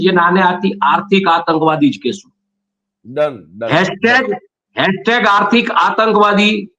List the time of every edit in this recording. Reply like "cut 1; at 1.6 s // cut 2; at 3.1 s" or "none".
none